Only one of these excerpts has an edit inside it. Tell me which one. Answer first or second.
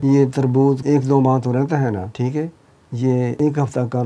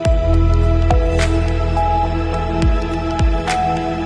first